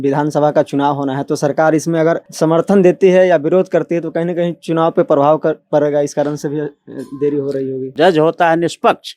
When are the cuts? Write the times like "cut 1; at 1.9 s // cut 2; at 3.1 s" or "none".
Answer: cut 1; at 2.3 s // cut 2; at 7.9 s